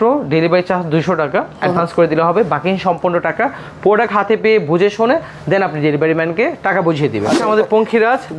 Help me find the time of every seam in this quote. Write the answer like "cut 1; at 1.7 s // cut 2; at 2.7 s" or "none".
cut 1; at 7.4 s